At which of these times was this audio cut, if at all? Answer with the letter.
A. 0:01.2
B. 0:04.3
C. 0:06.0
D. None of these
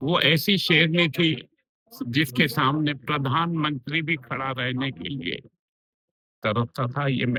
D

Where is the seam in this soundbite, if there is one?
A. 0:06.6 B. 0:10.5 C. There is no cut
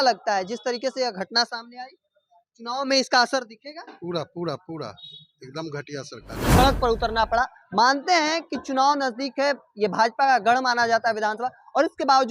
A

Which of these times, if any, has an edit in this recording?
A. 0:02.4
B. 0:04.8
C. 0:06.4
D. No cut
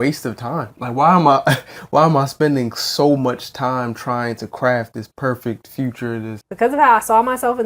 C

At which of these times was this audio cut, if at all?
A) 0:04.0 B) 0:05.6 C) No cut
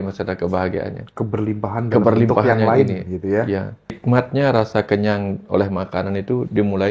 A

